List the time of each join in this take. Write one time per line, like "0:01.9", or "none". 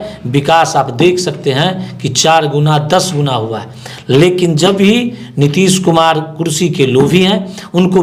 none